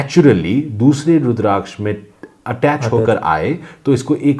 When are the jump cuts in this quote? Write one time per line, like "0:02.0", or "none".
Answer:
none